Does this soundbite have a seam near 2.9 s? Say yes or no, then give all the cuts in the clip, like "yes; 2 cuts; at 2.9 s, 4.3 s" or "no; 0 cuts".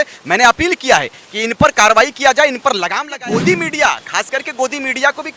yes; 1 cut; at 2.9 s